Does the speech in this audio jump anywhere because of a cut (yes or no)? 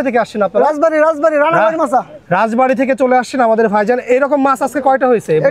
no